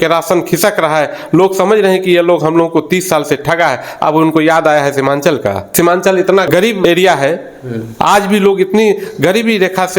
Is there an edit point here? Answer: yes; 1 cut; at 5.6 s

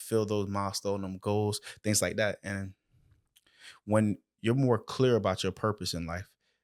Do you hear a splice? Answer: no; 0 cuts

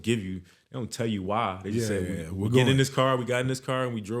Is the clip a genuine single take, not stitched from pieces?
yes; 0 cuts

